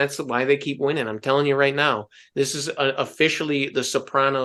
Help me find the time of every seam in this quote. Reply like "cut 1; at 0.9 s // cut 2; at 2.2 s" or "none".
none